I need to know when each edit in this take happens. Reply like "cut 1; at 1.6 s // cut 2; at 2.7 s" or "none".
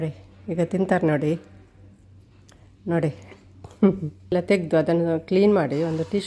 cut 1; at 4.3 s